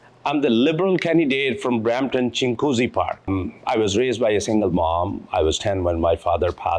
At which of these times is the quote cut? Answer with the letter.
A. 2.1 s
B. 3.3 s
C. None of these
B